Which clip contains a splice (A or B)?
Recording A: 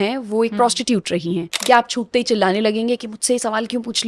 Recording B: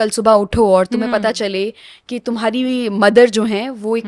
A